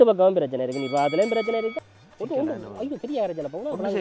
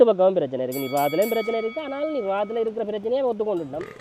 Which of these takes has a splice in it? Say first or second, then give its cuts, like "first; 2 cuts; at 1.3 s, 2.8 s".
first; 1 cut; at 1.8 s